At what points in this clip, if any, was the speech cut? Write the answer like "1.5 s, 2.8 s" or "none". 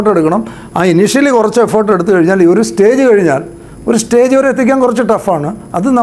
none